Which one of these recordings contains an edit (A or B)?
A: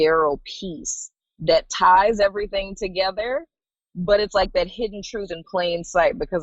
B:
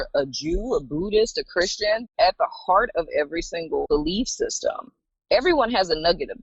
B